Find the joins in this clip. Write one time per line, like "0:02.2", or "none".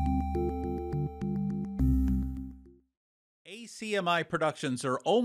0:02.9